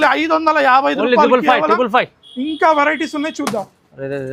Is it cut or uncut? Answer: uncut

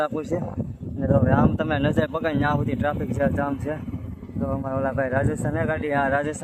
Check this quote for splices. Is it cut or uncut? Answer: uncut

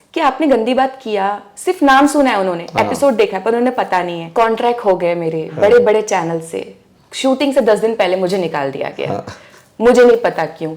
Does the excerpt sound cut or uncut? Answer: cut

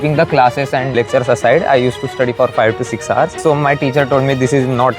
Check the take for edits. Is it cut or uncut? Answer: cut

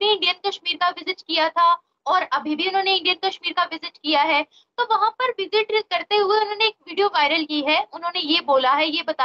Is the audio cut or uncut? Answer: uncut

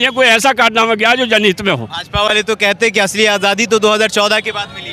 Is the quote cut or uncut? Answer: uncut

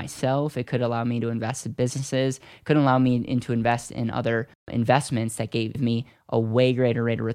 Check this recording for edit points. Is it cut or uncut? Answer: cut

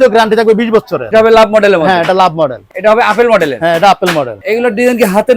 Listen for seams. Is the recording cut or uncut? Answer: cut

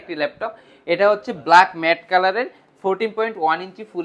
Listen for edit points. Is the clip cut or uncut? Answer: uncut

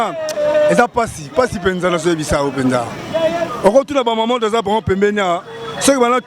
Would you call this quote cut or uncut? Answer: uncut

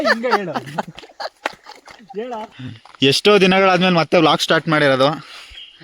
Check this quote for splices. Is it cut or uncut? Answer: cut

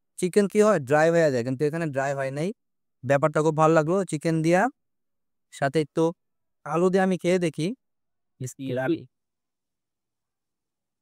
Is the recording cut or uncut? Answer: uncut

